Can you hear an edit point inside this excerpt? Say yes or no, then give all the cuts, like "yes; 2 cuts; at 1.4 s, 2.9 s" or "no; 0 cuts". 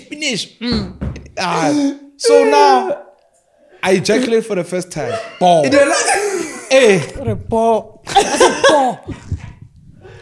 no; 0 cuts